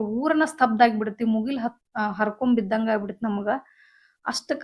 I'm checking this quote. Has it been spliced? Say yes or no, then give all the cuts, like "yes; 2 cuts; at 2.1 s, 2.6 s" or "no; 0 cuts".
no; 0 cuts